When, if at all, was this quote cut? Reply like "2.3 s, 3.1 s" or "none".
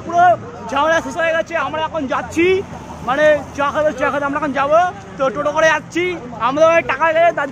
none